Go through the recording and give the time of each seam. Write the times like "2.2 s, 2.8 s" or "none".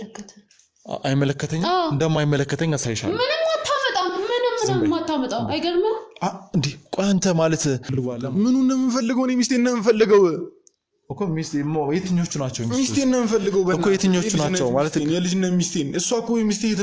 7.9 s